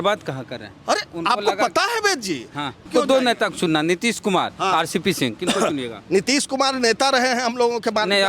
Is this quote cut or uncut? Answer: cut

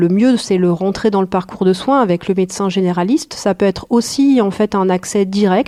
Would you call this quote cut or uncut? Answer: uncut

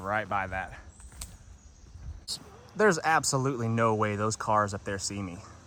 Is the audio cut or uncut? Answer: uncut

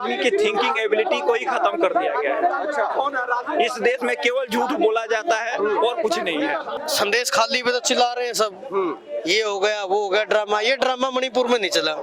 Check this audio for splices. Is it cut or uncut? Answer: cut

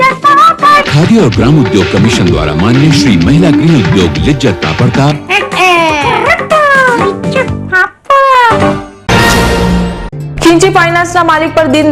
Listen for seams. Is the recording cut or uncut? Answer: cut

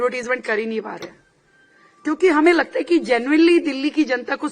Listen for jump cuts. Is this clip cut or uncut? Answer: uncut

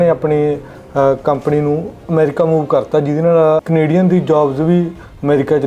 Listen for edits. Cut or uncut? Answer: cut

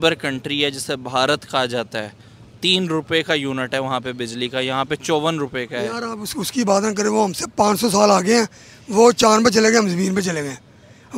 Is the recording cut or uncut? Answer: uncut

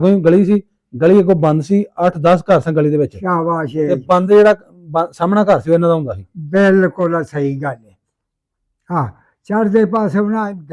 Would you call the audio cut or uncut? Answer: uncut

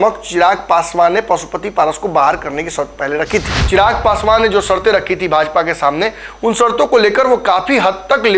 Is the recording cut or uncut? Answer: cut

